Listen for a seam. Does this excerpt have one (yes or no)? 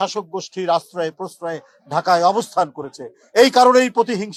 no